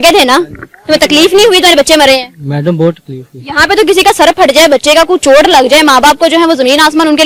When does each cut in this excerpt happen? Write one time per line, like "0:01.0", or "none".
none